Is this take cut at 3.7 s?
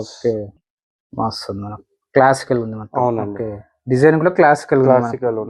no; 0 cuts

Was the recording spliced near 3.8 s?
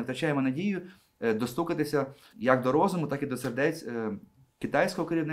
no; 1 cut; at 2.2 s

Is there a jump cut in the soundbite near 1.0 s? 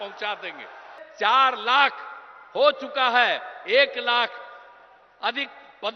yes; 1 cut; at 1.0 s

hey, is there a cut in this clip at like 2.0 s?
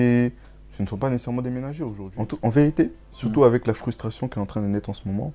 yes; 1 cut; at 2.0 s

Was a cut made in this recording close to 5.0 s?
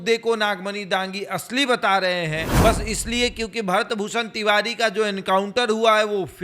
no; 1 cut; at 2.5 s

